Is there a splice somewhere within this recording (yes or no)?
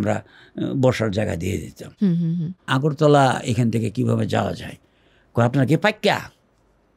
yes